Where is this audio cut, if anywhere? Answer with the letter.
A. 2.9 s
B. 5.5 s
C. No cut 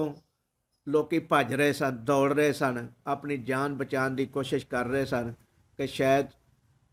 C